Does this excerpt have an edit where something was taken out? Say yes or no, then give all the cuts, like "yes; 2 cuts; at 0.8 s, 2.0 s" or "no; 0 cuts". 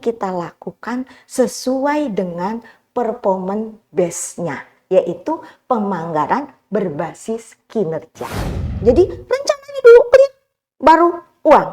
yes; 1 cut; at 8.5 s